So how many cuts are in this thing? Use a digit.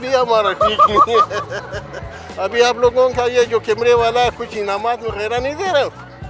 1